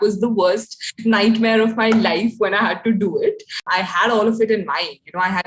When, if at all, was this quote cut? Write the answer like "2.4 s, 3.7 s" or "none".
3.5 s